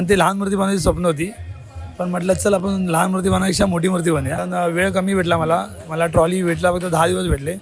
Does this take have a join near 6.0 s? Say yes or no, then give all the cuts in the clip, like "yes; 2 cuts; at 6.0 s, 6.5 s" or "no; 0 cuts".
no; 1 cut; at 4.4 s